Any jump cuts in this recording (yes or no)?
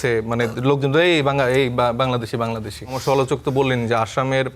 yes